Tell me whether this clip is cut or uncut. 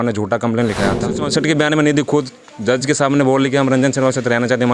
cut